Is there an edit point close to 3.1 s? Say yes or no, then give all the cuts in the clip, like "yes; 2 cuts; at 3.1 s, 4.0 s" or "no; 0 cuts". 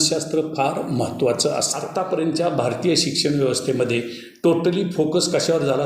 no; 1 cut; at 1.8 s